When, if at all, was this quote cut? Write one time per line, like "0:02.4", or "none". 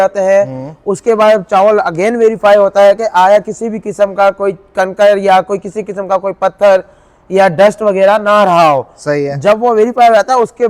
none